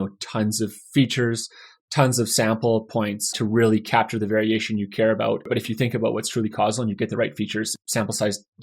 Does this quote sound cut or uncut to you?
cut